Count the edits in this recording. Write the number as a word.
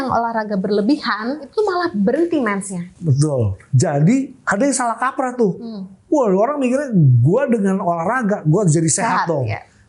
three